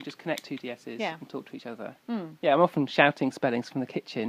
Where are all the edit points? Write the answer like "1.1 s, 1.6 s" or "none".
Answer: none

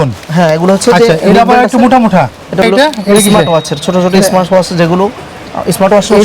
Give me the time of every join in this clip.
2.6 s

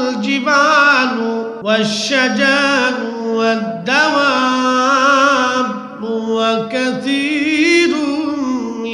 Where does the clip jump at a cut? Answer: 1.5 s

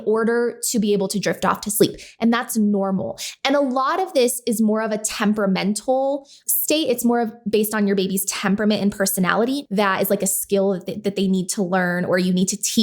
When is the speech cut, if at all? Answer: 6.4 s, 9.6 s

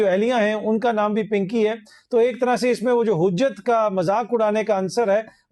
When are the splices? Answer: none

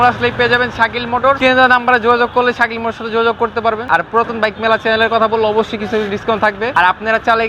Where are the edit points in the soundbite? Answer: 1.4 s, 3.8 s, 6.7 s

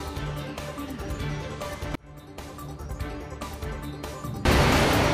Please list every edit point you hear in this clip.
3.1 s

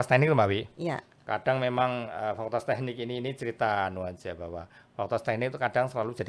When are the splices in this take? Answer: none

